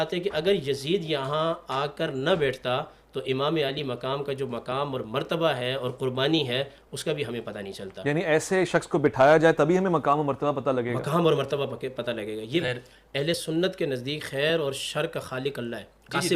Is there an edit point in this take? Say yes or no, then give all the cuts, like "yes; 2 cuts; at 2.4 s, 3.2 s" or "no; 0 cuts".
yes; 1 cut; at 12.6 s